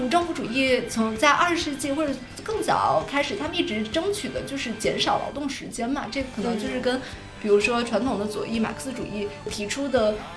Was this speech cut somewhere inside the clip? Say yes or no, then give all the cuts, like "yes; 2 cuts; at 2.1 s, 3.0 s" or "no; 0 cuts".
no; 0 cuts